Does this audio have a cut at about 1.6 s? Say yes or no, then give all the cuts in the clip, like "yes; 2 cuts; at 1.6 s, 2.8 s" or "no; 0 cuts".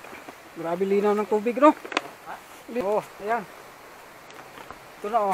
no; 1 cut; at 2.8 s